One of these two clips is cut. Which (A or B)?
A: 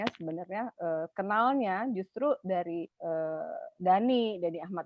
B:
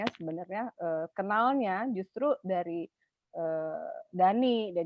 A